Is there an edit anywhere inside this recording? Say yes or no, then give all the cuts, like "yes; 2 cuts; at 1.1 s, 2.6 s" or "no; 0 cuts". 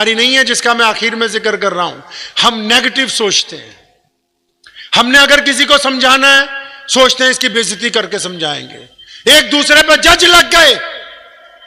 no; 0 cuts